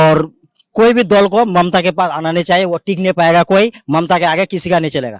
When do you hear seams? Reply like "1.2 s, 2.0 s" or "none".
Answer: none